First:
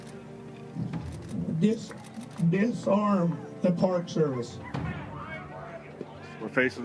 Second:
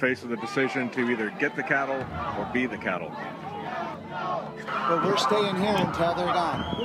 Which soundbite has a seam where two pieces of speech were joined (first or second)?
first